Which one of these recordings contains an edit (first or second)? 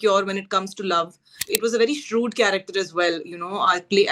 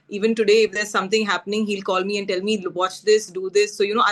first